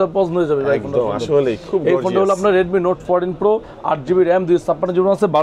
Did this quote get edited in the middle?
no; 0 cuts

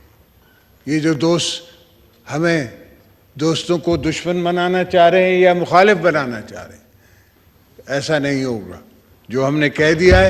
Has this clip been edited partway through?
no; 0 cuts

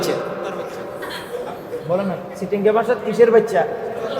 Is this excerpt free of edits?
yes; 0 cuts

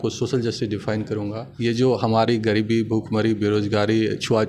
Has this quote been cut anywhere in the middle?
yes; 1 cut; at 1.4 s

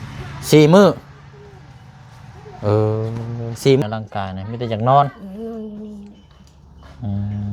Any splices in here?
yes; 1 cut; at 3.8 s

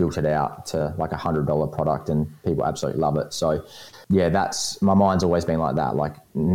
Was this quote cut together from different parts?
yes; 1 cut; at 3.9 s

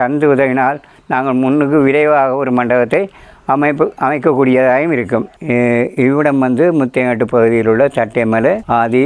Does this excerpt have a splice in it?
yes; 1 cut; at 5.4 s

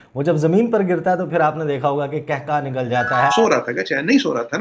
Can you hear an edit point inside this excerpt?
yes; 1 cut; at 3.3 s

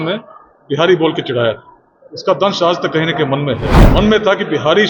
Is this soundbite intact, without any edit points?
no; 1 cut; at 3.8 s

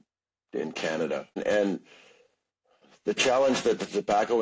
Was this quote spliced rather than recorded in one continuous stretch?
yes; 1 cut; at 1.4 s

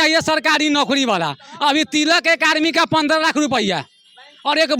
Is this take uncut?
yes; 0 cuts

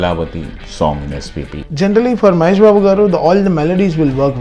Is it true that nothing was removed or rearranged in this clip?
yes; 0 cuts

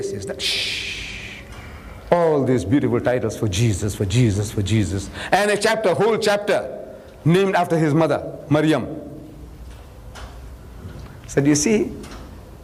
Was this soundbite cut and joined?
no; 0 cuts

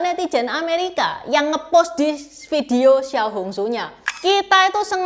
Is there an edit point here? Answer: no; 0 cuts

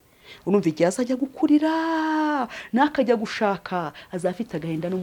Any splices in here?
no; 0 cuts

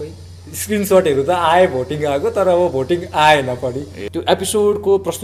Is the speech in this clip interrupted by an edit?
yes; 1 cut; at 3.9 s

